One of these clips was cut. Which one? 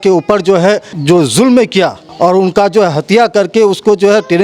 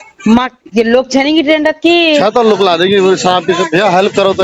first; 2 cuts; at 0.9 s, 2.0 s

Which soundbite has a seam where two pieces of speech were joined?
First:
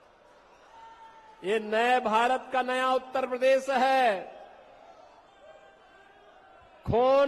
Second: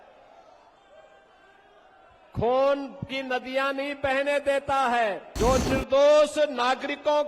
second; 1 cut; at 5.2 s

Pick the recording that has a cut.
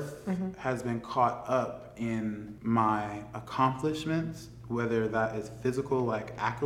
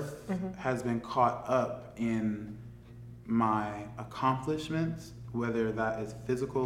first; 1 cut; at 2.5 s

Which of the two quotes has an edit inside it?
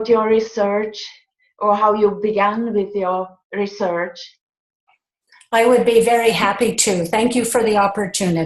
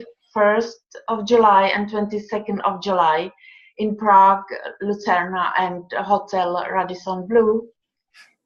first; 1 cut; at 5.3 s

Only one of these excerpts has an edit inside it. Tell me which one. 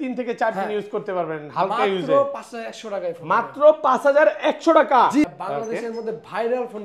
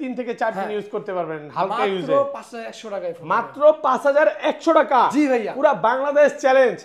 first; 1 cut; at 5.2 s

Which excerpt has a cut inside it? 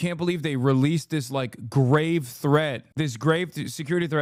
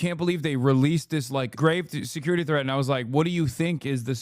second; 1 cut; at 1.5 s

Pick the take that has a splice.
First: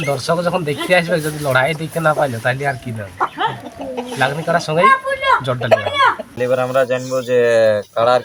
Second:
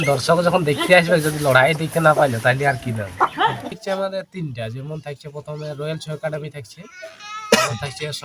second; 1 cut; at 3.7 s

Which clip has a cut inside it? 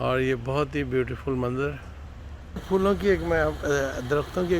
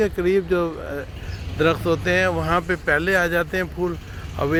first; 1 cut; at 2.4 s

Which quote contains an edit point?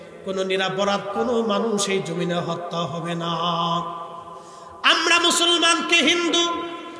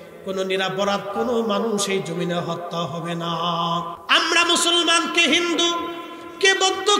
second; 1 cut; at 4.0 s

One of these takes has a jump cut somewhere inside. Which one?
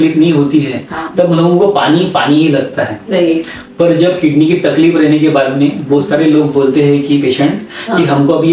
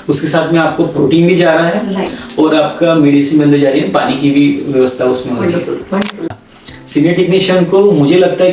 second; 1 cut; at 6.3 s

